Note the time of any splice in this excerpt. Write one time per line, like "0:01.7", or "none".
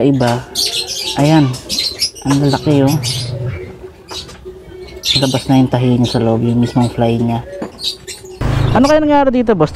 0:08.4